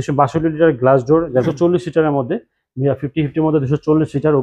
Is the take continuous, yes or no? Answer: no